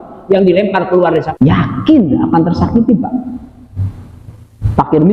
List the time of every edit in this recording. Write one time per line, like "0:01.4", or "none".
0:01.3